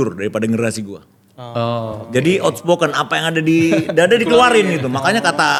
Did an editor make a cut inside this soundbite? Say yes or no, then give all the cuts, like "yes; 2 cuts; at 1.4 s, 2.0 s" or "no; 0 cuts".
no; 0 cuts